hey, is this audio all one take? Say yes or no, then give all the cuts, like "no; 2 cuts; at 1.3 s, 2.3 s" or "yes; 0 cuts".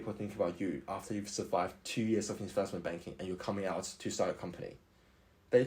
yes; 0 cuts